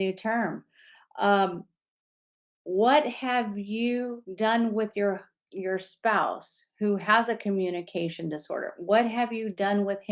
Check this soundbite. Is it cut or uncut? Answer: cut